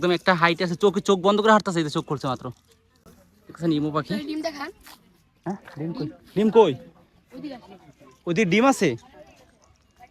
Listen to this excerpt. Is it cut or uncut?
uncut